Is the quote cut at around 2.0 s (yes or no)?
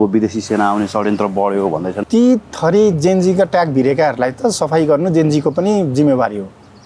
yes